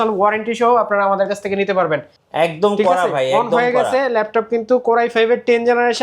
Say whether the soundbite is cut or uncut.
cut